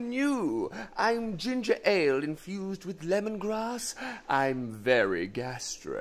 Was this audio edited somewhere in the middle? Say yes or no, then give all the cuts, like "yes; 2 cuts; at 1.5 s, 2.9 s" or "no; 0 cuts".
yes; 1 cut; at 3.8 s